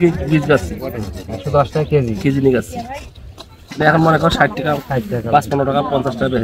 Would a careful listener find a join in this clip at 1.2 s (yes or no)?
no